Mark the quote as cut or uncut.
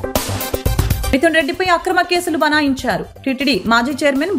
cut